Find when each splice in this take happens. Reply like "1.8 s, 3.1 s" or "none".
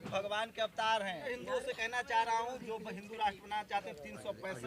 1.3 s